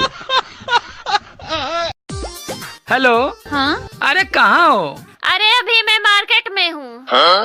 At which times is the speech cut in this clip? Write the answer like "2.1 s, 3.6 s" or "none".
none